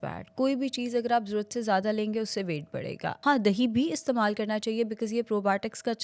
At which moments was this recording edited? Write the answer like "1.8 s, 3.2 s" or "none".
3.2 s